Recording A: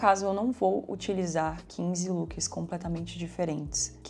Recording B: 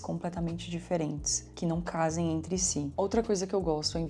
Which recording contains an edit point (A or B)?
B